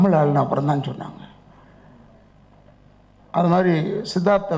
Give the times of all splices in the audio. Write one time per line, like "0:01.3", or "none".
none